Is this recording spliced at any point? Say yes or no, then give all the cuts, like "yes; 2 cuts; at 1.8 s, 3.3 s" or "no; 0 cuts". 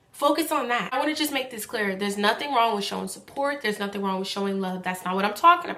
yes; 1 cut; at 0.9 s